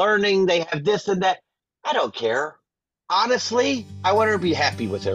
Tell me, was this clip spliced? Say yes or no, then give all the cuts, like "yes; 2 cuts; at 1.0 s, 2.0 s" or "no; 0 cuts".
yes; 1 cut; at 3.9 s